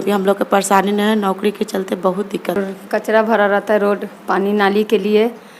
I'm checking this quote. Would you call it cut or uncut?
cut